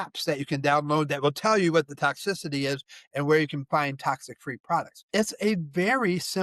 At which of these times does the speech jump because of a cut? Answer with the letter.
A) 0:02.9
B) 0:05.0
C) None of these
B